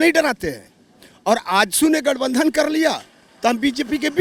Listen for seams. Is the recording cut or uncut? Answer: uncut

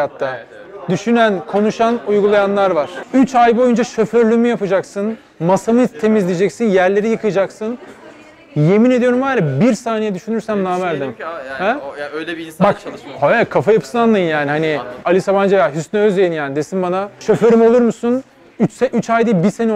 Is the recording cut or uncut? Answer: cut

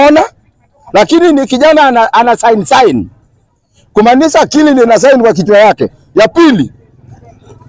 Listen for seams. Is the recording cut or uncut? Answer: uncut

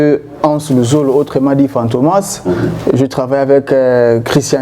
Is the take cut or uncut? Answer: cut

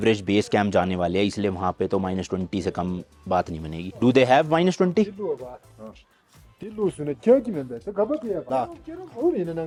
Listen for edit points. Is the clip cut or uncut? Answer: uncut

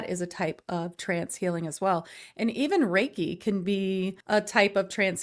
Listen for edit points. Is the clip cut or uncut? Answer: uncut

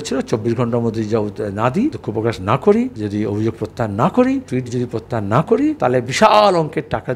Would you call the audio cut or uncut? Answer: cut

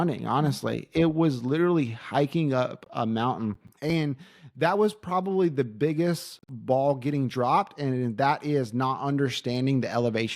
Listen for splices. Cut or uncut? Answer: cut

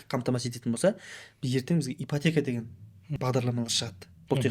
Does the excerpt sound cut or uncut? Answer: cut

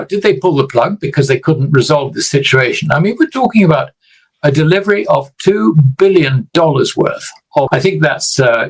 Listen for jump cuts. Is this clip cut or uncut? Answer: cut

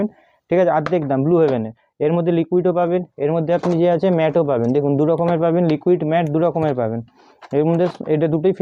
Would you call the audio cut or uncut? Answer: uncut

